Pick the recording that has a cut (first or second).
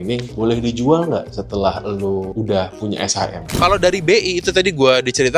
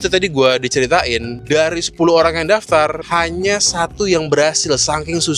first